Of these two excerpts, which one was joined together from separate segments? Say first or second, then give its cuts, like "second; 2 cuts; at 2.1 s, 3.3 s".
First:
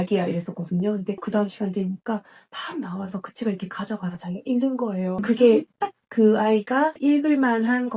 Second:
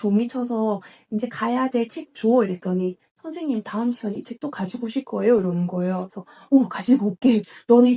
first; 1 cut; at 5.2 s